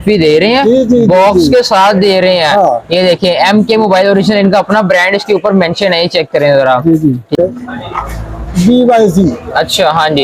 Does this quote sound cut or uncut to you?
cut